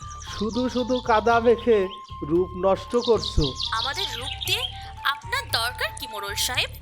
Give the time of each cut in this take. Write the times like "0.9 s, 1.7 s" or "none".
3.6 s